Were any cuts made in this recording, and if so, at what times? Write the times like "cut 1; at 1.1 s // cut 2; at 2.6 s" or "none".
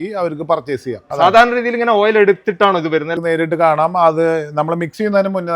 cut 1; at 1.0 s // cut 2; at 3.1 s